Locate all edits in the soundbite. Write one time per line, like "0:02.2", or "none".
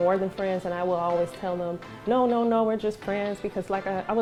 none